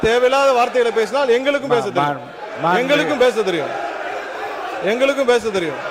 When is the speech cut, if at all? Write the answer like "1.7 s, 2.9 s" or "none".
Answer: none